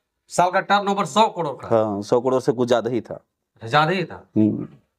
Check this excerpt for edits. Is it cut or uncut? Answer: uncut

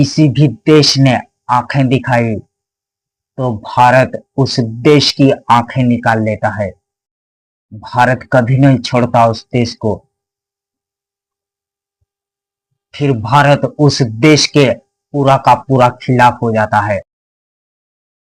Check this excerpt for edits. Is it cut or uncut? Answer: uncut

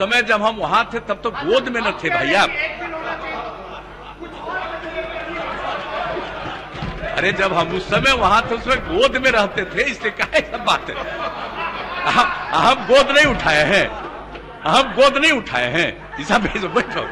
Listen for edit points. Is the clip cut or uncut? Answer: uncut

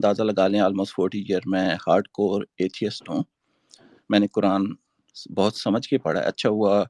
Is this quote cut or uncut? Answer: uncut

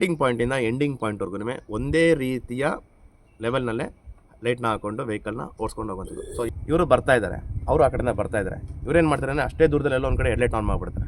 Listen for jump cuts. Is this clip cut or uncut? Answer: cut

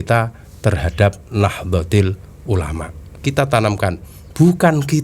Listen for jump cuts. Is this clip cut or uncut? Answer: cut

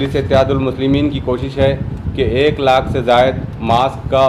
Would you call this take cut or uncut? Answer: uncut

